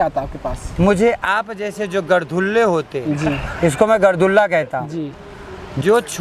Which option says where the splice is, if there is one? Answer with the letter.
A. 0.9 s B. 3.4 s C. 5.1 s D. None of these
D